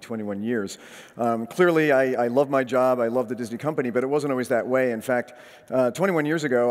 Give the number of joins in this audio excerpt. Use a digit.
1